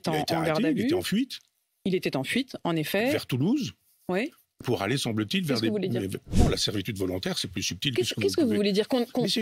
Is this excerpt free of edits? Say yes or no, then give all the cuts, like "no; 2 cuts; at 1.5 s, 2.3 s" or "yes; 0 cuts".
no; 1 cut; at 6.3 s